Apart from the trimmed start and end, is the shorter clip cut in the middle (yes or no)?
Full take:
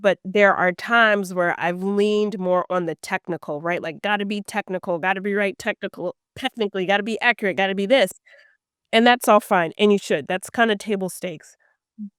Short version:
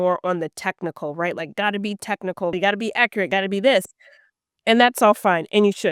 yes